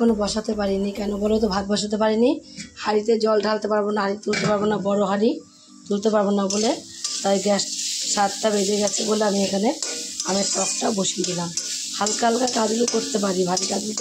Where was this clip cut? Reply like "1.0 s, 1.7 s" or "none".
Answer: none